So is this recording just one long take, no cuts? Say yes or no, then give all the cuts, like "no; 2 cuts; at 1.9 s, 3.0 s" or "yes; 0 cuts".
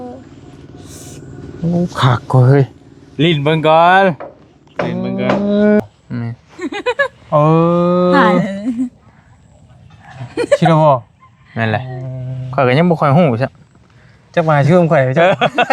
no; 1 cut; at 5.8 s